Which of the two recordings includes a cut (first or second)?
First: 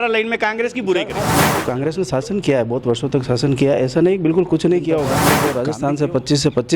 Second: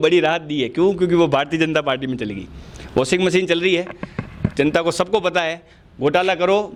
first